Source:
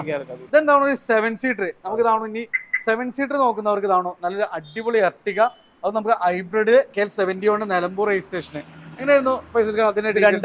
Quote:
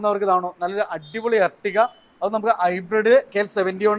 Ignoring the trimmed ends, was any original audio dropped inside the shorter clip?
no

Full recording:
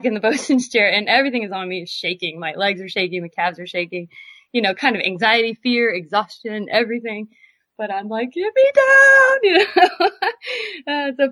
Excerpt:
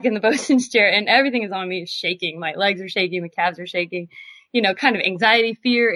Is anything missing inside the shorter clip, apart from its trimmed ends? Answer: no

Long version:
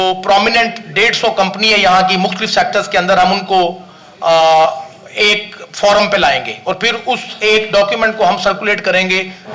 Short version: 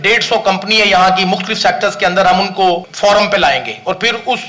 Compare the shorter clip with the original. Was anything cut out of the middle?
yes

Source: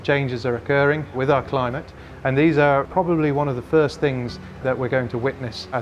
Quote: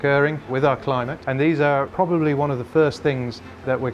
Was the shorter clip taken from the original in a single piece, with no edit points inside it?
no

